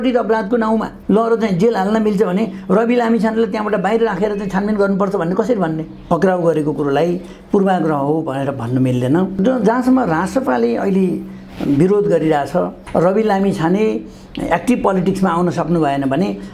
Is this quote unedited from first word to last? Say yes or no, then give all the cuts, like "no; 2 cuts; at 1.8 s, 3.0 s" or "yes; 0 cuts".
no; 3 cuts; at 5.9 s, 9.4 s, 12.8 s